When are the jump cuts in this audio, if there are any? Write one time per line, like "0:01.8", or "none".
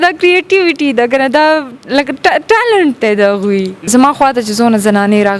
0:03.9